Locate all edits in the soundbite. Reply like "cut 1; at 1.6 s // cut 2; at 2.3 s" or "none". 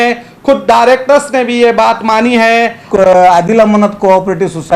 cut 1; at 2.8 s